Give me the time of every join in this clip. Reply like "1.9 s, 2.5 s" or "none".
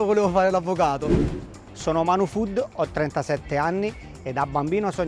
1.3 s